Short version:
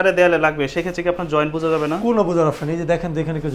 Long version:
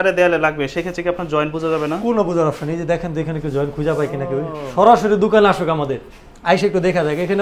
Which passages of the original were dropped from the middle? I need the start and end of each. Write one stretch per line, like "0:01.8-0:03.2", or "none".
none